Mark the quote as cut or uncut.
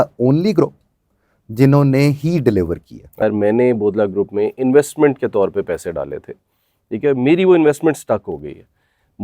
cut